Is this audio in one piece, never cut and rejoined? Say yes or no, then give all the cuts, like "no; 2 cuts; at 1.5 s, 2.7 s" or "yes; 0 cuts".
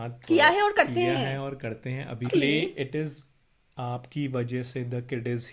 no; 1 cut; at 2.3 s